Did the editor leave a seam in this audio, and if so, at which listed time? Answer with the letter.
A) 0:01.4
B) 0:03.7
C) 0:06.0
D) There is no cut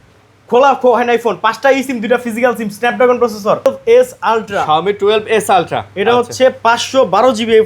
B